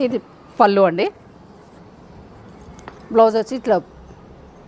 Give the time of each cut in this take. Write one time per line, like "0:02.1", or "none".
none